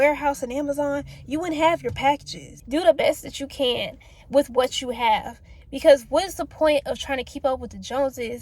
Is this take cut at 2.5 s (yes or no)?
yes